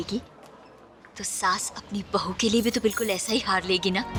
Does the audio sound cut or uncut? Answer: uncut